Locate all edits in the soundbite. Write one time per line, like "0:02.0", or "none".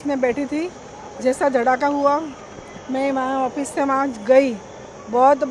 none